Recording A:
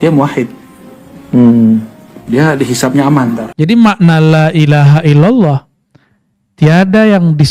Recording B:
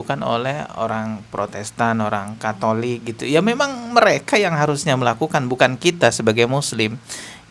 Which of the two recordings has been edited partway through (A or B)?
A